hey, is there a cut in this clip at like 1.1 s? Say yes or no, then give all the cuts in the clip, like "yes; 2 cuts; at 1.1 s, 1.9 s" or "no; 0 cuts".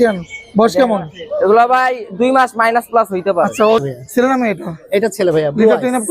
no; 1 cut; at 3.8 s